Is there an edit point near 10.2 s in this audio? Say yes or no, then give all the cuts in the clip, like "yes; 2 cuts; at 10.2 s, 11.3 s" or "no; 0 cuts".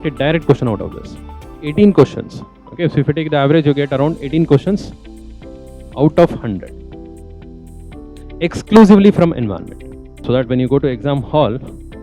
yes; 2 cuts; at 1.6 s, 10.2 s